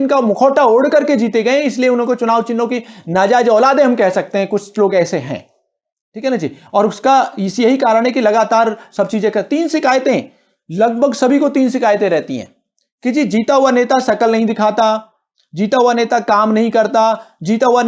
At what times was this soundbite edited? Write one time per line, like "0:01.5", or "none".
none